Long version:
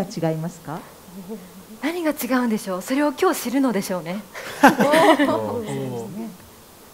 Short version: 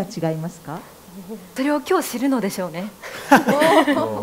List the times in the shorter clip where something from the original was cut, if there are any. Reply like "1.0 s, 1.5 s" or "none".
1.5 s